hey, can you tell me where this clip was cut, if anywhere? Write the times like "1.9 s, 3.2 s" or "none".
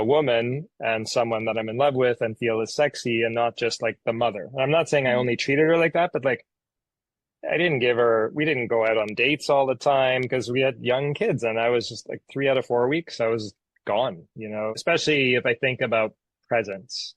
14.8 s